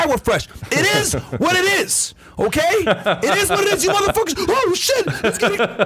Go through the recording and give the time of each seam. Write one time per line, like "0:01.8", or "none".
none